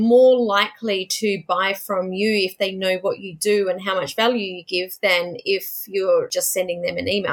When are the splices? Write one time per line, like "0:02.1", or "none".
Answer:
0:06.3